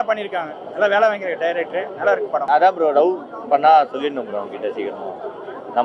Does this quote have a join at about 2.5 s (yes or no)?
yes